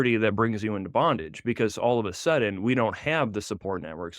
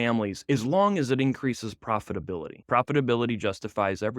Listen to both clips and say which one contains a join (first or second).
second